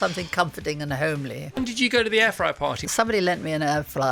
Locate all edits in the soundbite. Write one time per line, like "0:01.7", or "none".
0:01.6
0:02.8